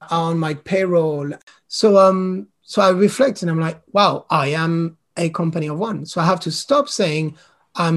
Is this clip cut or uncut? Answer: cut